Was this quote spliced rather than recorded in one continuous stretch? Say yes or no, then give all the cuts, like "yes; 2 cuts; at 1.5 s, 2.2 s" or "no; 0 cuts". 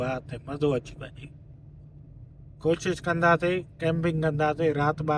no; 0 cuts